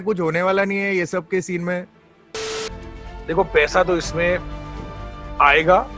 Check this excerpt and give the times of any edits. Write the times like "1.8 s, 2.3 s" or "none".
2.3 s